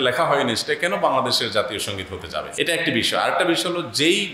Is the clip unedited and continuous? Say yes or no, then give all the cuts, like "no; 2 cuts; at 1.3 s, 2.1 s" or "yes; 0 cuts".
no; 1 cut; at 2.5 s